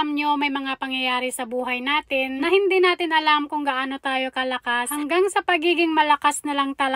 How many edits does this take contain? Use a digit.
2